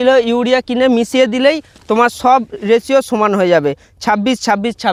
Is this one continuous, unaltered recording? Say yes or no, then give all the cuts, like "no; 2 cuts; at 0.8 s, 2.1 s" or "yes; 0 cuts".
yes; 0 cuts